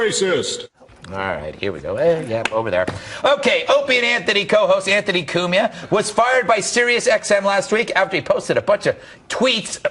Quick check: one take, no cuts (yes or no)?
no